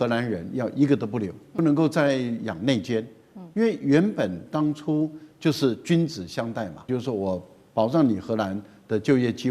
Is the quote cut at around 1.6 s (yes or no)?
yes